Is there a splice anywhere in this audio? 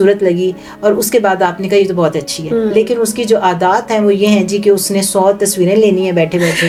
no; 0 cuts

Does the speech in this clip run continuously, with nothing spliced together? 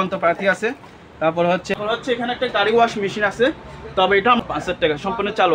no; 2 cuts; at 1.7 s, 4.4 s

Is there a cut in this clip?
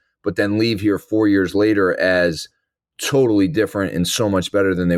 no; 0 cuts

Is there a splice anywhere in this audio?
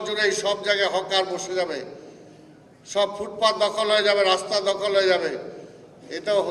no; 0 cuts

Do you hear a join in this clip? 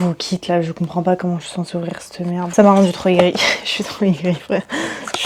no; 0 cuts

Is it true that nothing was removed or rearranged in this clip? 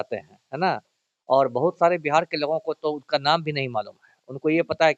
yes; 0 cuts

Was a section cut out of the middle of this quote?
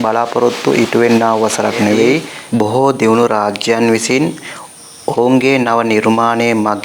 yes; 1 cut; at 2.3 s

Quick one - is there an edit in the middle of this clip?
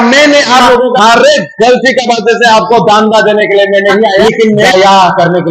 yes; 2 cuts; at 0.9 s, 4.4 s

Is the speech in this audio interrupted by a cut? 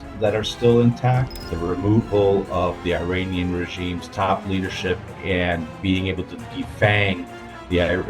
yes; 1 cut; at 1.5 s

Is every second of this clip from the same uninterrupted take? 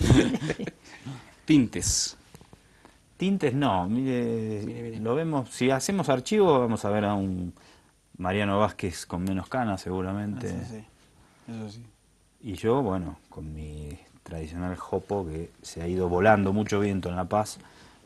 yes; 0 cuts

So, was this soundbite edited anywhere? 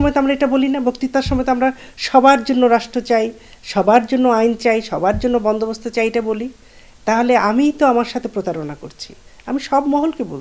no; 0 cuts

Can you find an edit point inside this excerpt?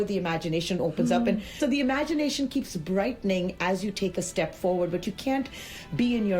yes; 1 cut; at 1.6 s

